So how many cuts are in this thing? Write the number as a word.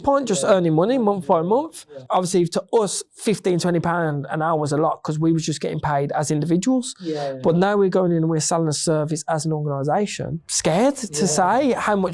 two